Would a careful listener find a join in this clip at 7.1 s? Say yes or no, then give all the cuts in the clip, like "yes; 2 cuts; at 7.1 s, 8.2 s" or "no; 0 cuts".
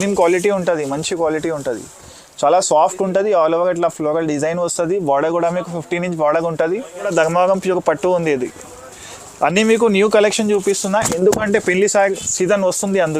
yes; 1 cut; at 7.1 s